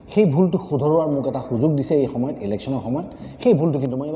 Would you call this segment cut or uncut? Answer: uncut